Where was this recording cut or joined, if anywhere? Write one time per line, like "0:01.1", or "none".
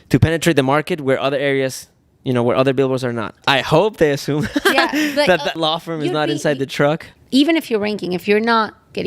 0:03.4
0:05.6
0:07.1